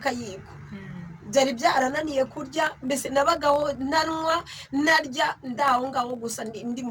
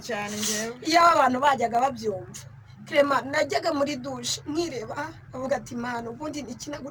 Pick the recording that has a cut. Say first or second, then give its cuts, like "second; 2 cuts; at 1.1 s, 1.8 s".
first; 1 cut; at 5.4 s